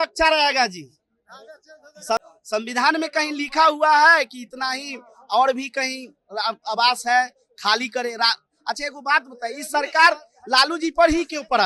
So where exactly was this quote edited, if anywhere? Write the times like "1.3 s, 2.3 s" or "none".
2.2 s

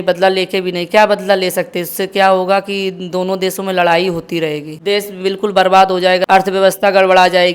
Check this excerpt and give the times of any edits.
4.7 s, 6.2 s

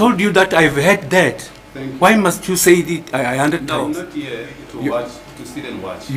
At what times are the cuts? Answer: 3.6 s

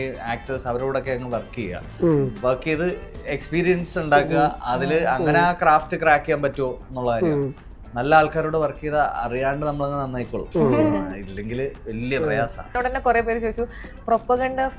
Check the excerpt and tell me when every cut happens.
10.4 s, 12.7 s

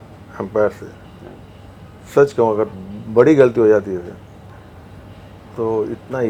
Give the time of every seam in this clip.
none

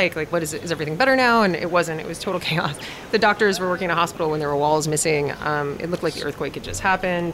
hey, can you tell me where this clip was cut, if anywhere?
2.9 s

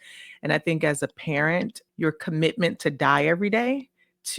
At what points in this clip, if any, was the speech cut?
1.8 s

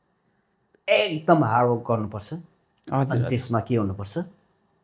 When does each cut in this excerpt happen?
none

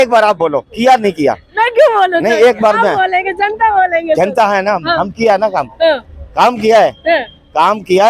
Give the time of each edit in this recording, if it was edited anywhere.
none

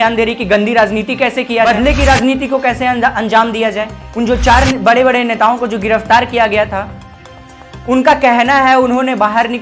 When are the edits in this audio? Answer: 1.7 s, 4.0 s

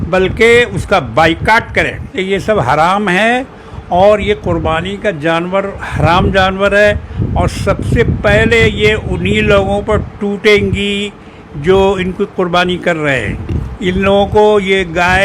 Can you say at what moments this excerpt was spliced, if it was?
2.1 s

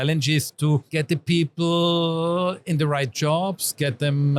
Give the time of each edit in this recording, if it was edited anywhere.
none

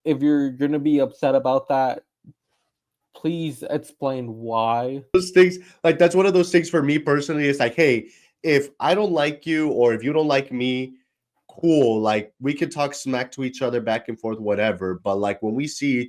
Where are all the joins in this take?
5.1 s

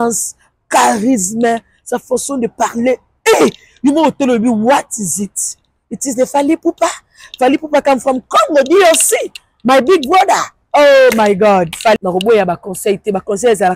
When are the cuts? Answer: 12.0 s

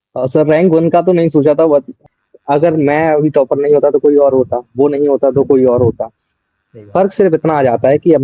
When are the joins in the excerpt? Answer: 2.0 s

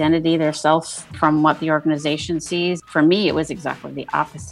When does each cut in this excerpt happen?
2.8 s

